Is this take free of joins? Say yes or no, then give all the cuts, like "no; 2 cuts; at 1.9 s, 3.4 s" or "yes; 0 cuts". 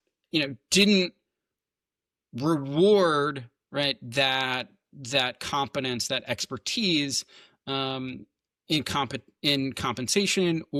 yes; 0 cuts